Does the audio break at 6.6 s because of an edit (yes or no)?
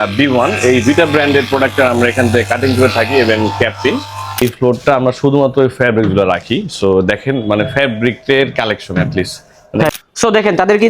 no